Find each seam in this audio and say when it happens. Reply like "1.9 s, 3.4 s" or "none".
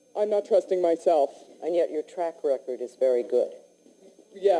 none